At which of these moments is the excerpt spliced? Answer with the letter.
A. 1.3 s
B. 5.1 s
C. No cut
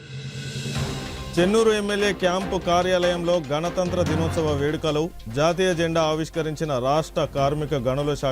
A